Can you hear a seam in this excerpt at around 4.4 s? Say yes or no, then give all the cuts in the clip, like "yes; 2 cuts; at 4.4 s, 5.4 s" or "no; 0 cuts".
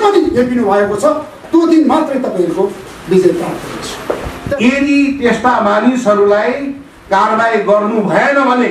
yes; 1 cut; at 4.4 s